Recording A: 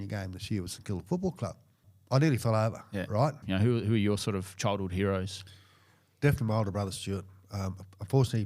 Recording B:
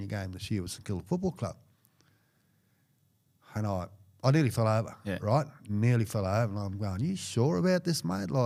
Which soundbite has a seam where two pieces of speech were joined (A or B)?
A